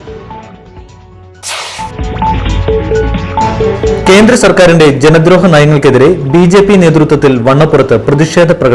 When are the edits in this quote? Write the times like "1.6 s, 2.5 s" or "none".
none

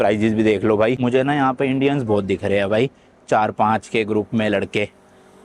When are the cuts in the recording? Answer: 1.0 s

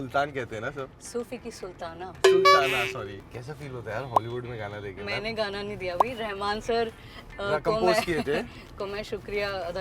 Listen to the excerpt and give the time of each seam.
2.2 s, 3.2 s

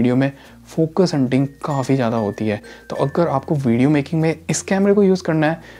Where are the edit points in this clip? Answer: none

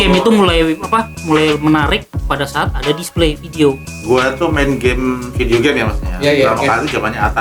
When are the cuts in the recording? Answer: 3.9 s

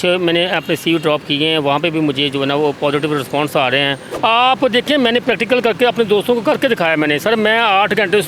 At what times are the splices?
4.0 s

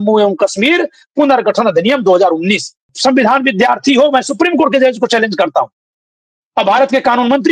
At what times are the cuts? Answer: 2.9 s

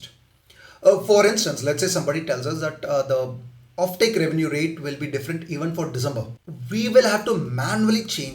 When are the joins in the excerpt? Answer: 6.4 s

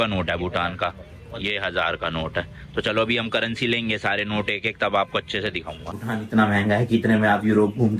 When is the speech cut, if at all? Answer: 5.9 s

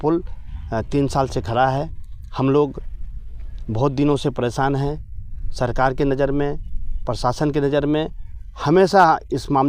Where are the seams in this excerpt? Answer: none

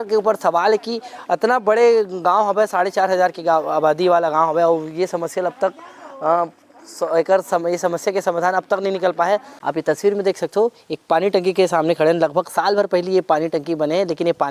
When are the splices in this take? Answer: 9.5 s

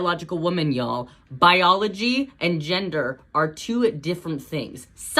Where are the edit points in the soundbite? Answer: 1.2 s

